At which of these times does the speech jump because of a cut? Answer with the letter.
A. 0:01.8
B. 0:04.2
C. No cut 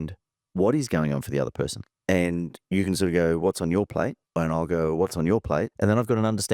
A